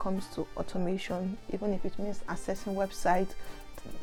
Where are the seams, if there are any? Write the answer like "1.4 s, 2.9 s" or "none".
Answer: none